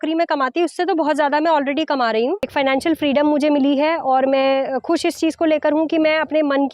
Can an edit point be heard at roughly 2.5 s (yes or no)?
yes